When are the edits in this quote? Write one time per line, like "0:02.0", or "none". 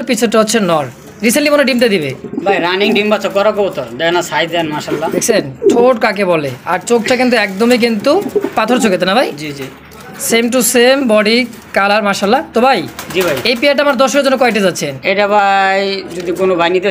none